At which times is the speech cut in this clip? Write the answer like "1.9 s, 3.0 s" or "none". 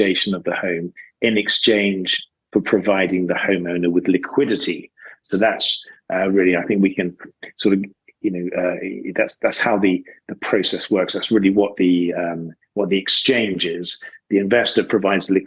none